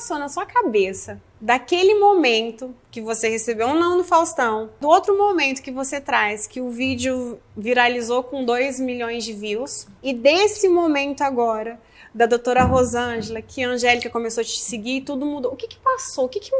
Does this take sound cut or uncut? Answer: cut